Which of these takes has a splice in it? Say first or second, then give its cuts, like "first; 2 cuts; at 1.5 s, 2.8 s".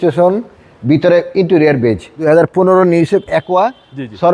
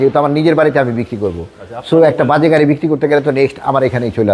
first; 1 cut; at 2.1 s